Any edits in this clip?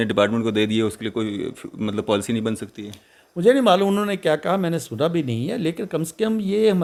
no; 0 cuts

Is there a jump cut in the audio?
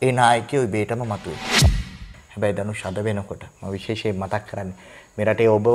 yes; 1 cut; at 1.6 s

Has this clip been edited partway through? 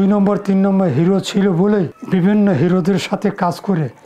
yes; 1 cut; at 2.0 s

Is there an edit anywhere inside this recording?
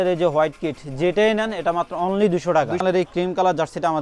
yes; 1 cut; at 2.8 s

